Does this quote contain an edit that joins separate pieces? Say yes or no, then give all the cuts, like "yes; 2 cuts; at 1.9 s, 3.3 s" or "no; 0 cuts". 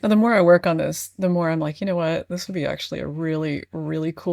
no; 0 cuts